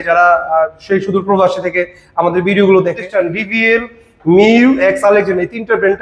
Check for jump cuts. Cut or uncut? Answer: cut